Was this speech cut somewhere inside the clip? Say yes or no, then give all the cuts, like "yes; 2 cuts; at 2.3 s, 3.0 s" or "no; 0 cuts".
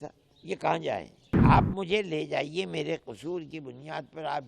yes; 1 cut; at 1.2 s